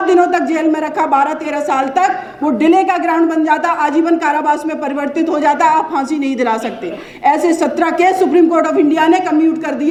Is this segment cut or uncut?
uncut